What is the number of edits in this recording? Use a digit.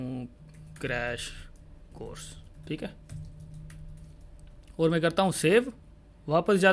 0